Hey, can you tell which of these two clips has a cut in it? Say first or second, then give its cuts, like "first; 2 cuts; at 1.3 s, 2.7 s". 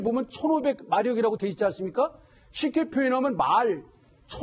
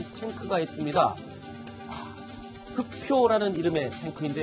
first; 1 cut; at 2.2 s